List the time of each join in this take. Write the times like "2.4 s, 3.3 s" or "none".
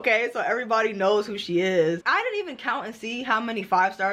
2.0 s